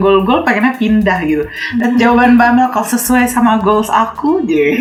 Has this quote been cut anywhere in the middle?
no; 0 cuts

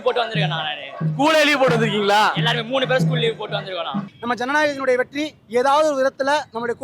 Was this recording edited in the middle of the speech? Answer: yes; 1 cut; at 4.1 s

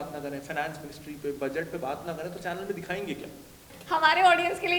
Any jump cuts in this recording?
yes; 1 cut; at 3.7 s

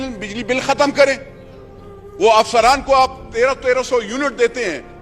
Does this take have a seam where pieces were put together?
no; 0 cuts

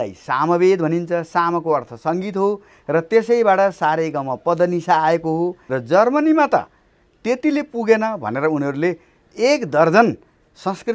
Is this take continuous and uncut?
no; 1 cut; at 5.6 s

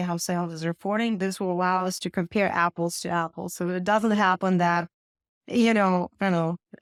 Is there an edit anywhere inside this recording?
no; 0 cuts

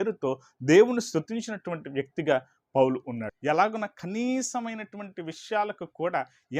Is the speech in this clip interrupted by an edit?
yes; 1 cut; at 3.3 s

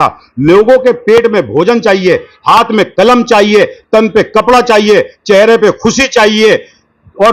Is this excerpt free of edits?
yes; 0 cuts

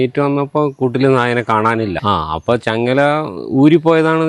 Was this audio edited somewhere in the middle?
yes; 1 cut; at 2.0 s

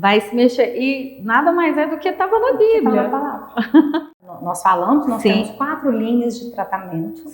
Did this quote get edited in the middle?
yes; 1 cut; at 4.2 s

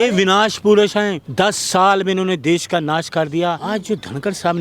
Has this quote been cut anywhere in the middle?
yes; 2 cuts; at 1.2 s, 3.6 s

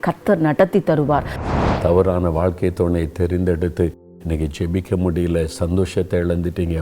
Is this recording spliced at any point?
yes; 1 cut; at 1.4 s

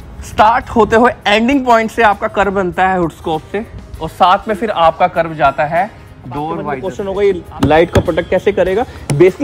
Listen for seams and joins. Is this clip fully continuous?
no; 1 cut; at 6.9 s

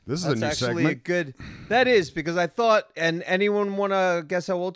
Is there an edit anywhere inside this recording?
no; 0 cuts

